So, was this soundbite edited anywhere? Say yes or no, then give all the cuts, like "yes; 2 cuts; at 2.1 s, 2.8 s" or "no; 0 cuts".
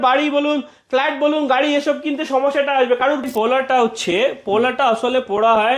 yes; 1 cut; at 3.3 s